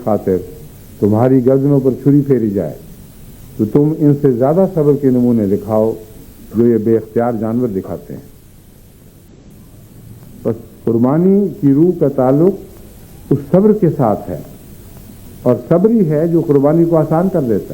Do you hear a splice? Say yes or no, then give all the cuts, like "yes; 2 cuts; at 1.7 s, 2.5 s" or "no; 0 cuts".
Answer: yes; 1 cut; at 9.3 s